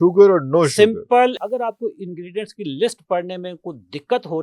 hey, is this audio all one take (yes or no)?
no